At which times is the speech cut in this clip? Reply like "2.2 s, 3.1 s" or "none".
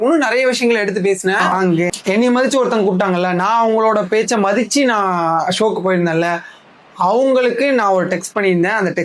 1.9 s